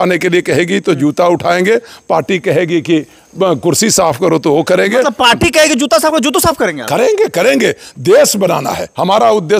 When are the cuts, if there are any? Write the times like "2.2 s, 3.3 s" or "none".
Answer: none